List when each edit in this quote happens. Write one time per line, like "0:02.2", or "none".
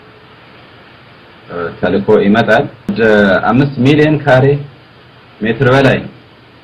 0:02.9